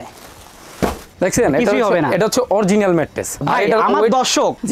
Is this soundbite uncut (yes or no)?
no